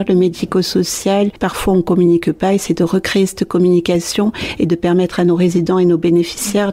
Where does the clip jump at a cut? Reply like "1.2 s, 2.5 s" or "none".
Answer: 1.3 s